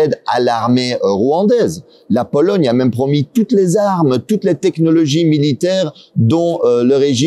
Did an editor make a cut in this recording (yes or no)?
no